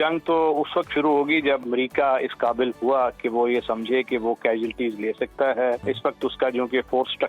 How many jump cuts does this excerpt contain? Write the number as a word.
two